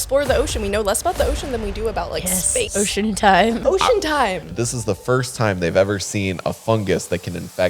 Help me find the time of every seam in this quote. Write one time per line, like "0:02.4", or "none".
0:02.7
0:03.6
0:04.5